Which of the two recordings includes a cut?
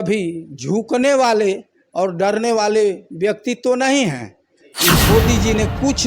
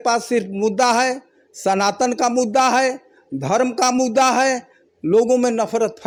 first; 1 cut; at 4.9 s

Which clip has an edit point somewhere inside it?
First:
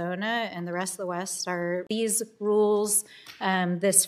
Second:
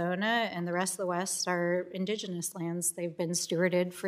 second; 1 cut; at 1.9 s

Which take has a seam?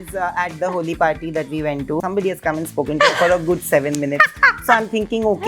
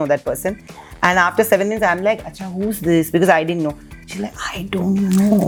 first; 1 cut; at 2.0 s

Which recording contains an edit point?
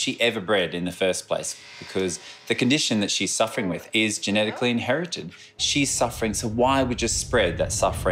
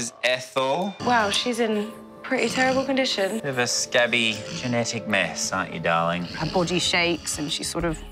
second; 3 cuts; at 1.0 s, 3.4 s, 6.4 s

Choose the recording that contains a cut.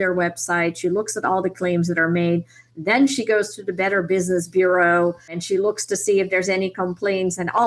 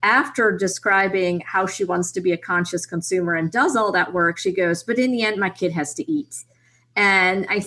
first; 1 cut; at 5.4 s

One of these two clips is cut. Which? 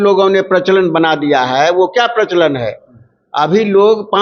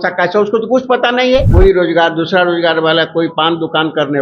second; 1 cut; at 1.5 s

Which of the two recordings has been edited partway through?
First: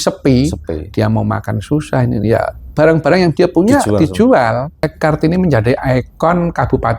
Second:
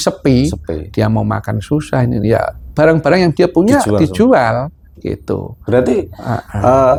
first; 1 cut; at 4.9 s

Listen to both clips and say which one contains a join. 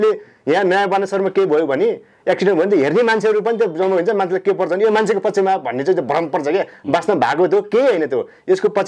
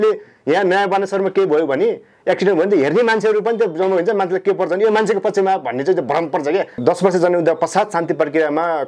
second; 1 cut; at 6.7 s

